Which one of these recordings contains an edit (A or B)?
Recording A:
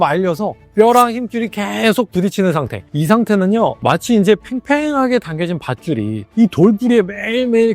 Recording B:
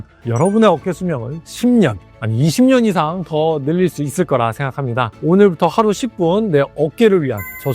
B